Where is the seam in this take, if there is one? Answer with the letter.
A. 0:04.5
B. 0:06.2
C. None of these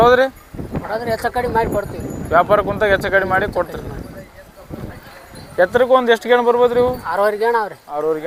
C